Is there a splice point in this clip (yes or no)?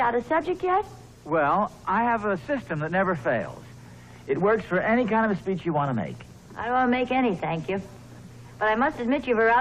no